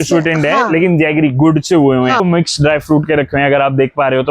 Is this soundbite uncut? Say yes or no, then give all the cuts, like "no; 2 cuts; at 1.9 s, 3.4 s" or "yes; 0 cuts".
no; 1 cut; at 2.2 s